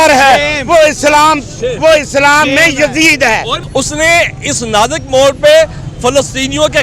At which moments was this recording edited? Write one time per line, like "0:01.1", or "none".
0:03.6